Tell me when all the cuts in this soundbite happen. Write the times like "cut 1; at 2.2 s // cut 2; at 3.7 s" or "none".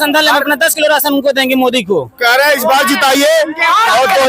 none

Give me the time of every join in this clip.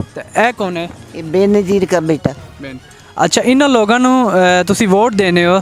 none

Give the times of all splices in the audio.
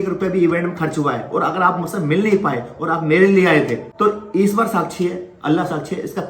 cut 1; at 3.9 s

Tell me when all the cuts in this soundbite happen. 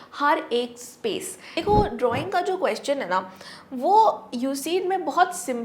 cut 1; at 1.5 s

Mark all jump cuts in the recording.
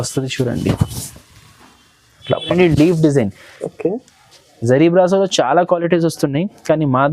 cut 1; at 2.5 s

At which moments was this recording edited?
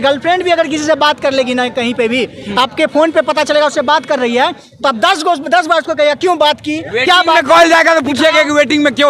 none

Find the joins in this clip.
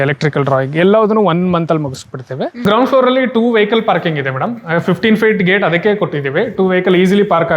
cut 1; at 2.5 s

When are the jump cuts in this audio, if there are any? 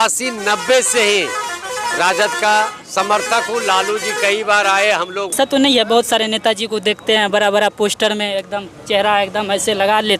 cut 1; at 5.3 s

